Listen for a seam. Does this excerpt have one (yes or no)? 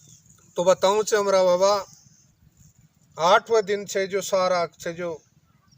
no